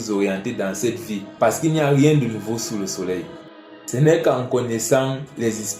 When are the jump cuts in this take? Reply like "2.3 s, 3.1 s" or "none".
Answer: 1.2 s, 3.4 s